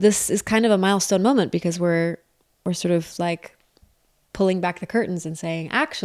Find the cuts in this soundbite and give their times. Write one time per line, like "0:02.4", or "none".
none